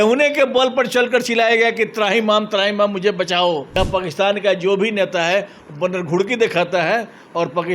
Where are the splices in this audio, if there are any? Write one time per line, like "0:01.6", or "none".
0:03.8